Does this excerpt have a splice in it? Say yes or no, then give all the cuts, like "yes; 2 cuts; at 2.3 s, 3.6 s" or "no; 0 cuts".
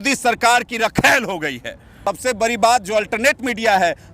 yes; 1 cut; at 2.0 s